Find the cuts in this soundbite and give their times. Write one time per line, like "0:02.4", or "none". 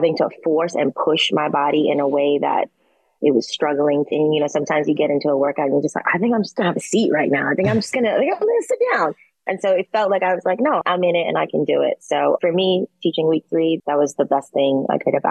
none